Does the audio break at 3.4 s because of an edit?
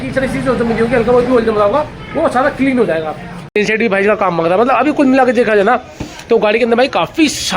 yes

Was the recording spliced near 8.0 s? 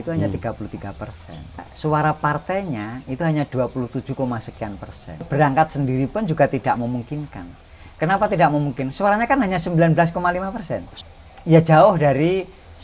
no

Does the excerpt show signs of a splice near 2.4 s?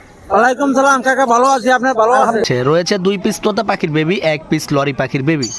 yes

